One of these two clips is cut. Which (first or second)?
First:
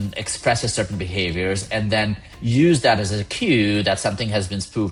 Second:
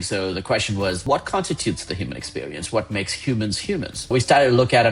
second